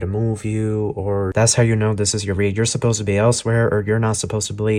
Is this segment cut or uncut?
cut